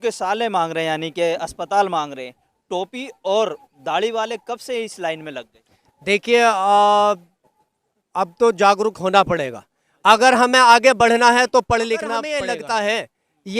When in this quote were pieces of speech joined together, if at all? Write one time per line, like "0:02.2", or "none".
0:12.4